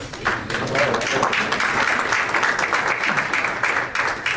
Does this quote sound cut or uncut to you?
uncut